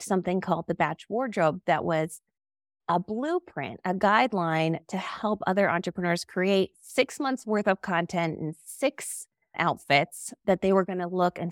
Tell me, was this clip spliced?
no; 0 cuts

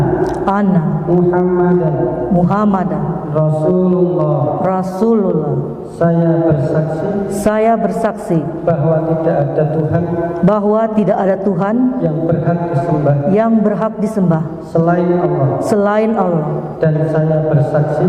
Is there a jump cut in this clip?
no; 0 cuts

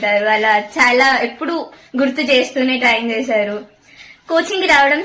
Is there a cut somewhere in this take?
no; 0 cuts

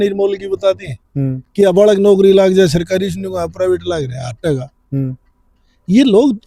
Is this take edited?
no; 0 cuts

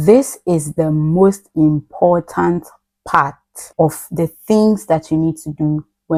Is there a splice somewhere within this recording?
no; 0 cuts

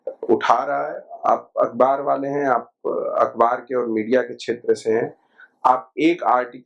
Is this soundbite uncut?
no; 1 cut; at 1.0 s

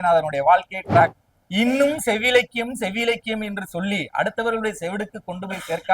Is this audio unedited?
no; 1 cut; at 1.2 s

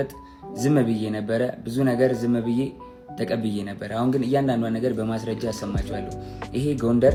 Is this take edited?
no; 0 cuts

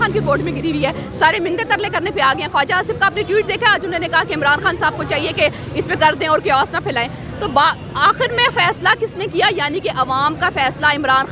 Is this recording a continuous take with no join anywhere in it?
yes; 0 cuts

